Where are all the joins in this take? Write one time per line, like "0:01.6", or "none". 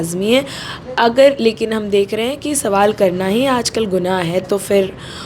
none